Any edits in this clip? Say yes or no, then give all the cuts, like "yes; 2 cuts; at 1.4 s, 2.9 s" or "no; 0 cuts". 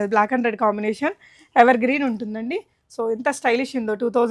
no; 0 cuts